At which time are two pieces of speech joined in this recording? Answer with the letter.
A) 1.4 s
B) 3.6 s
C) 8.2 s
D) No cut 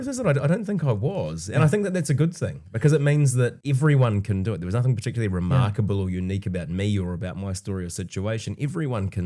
B